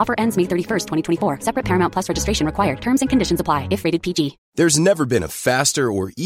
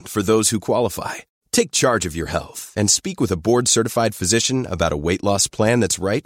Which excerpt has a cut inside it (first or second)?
first